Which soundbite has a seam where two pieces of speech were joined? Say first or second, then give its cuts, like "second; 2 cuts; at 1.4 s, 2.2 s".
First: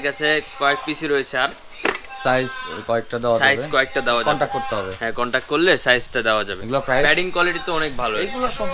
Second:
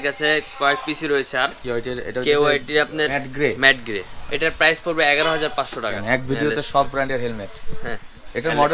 second; 4 cuts; at 1.6 s, 3.2 s, 4.2 s, 6.0 s